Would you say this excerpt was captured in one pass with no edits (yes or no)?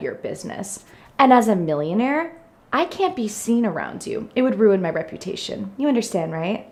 yes